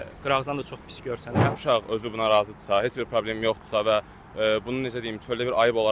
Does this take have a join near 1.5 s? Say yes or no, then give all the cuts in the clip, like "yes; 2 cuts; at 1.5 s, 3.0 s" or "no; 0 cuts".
yes; 1 cut; at 1.5 s